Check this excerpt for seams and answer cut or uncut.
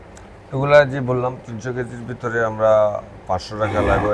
uncut